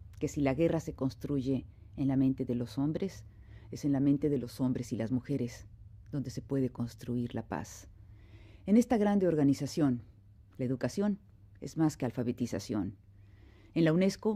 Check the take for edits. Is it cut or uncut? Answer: cut